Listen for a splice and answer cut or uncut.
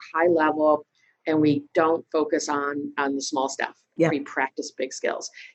uncut